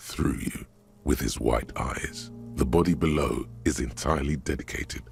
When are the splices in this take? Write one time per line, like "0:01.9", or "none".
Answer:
none